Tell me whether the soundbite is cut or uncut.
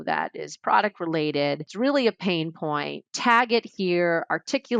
cut